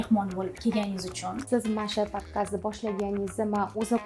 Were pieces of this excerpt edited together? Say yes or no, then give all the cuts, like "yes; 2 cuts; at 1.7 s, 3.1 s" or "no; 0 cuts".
yes; 1 cut; at 1.4 s